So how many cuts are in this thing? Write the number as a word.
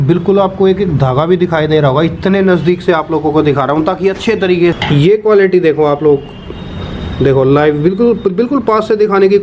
one